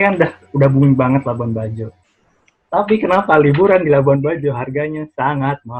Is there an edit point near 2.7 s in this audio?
no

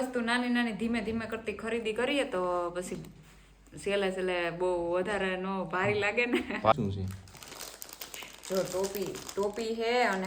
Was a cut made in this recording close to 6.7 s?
yes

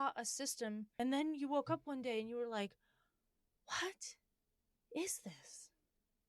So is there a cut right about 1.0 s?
yes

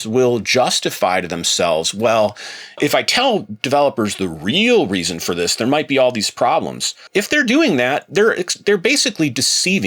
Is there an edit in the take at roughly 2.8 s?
yes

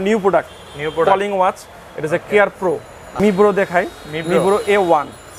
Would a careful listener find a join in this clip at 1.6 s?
no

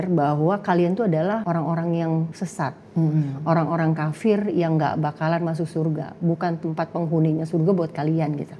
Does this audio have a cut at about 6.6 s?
no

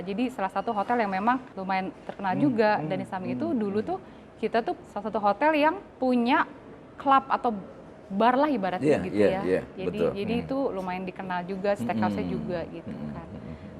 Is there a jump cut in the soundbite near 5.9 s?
yes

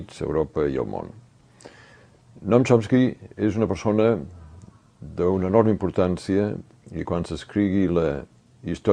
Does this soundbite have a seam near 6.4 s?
yes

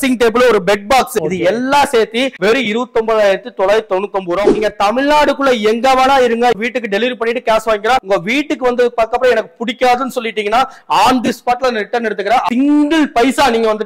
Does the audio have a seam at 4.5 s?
yes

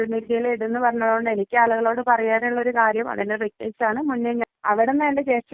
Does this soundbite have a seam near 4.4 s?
yes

